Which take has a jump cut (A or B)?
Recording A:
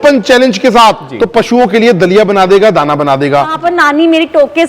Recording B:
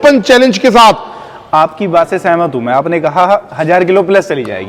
A